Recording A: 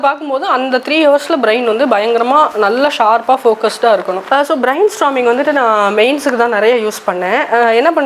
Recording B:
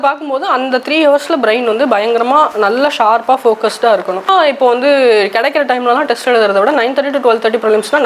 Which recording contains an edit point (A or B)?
A